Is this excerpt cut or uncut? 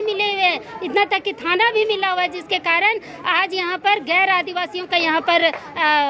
uncut